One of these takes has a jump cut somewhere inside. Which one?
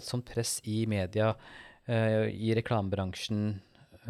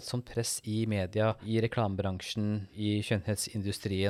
second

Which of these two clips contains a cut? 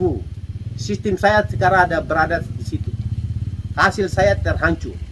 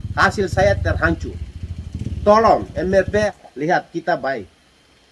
second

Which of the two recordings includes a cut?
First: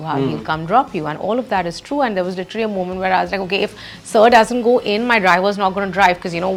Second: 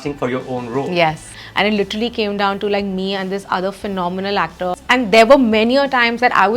second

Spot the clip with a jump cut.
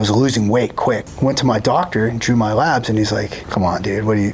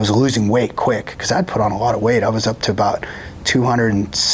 first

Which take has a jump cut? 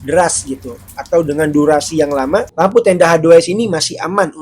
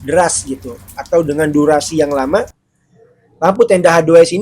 first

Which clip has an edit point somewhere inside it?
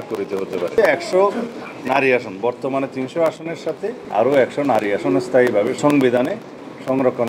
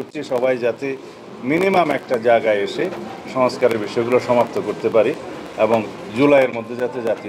first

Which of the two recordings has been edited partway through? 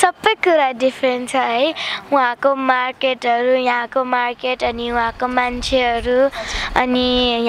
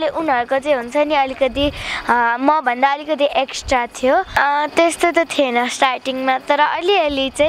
second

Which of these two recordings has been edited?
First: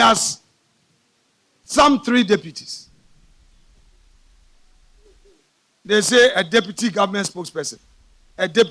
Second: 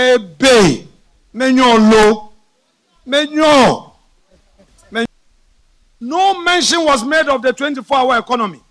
second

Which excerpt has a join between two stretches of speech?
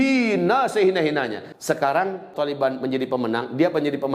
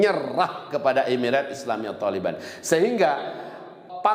first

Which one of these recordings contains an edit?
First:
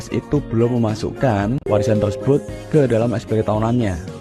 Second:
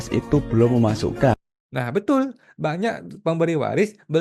first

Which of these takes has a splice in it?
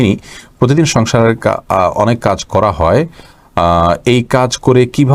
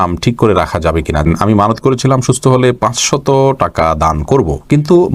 second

